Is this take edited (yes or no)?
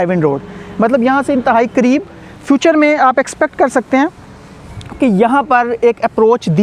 no